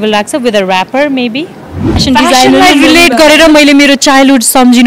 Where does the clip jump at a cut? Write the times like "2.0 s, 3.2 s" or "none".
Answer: 2.0 s